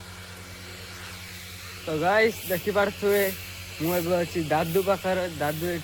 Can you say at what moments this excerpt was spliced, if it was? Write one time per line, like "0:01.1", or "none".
none